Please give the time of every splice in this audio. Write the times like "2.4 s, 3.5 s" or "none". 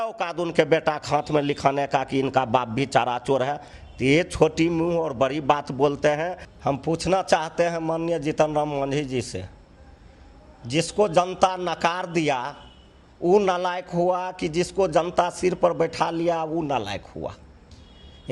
3.7 s, 6.4 s